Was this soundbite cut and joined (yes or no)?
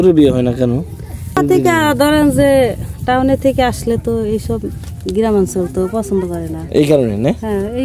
yes